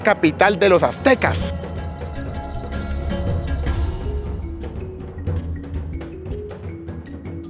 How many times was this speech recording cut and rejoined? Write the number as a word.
zero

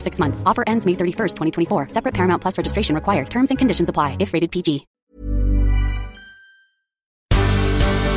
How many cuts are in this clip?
two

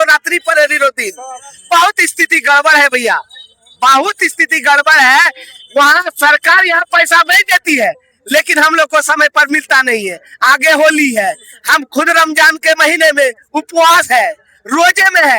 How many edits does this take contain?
zero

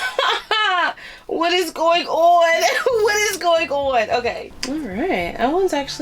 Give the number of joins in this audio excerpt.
one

